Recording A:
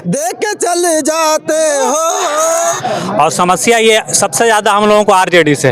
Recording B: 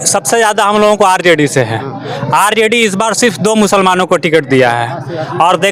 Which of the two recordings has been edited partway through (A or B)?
A